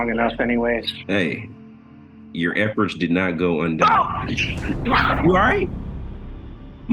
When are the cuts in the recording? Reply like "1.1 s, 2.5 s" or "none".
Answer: 0.9 s

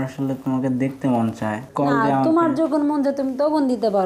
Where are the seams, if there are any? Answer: 1.6 s

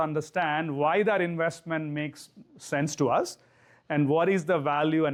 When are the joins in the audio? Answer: none

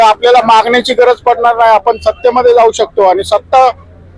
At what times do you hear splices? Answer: none

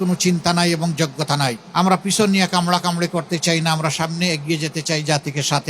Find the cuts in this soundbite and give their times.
1.6 s

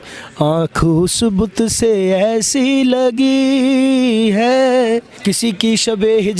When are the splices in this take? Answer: 5.1 s

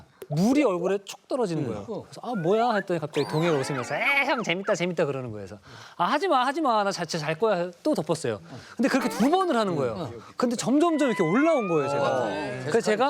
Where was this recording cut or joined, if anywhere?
none

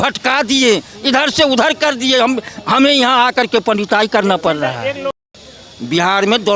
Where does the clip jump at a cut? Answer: 5.2 s

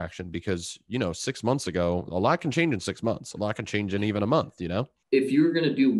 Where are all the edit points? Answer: 4.9 s

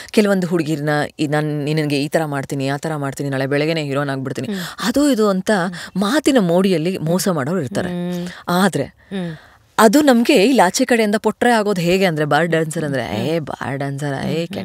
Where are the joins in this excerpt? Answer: none

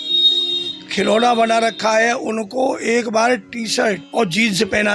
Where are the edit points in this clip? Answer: 4.0 s

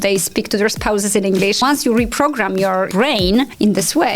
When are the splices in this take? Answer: 1.6 s, 3.3 s

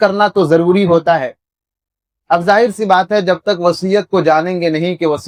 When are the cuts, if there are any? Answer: none

